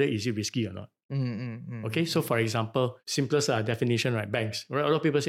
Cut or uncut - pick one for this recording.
uncut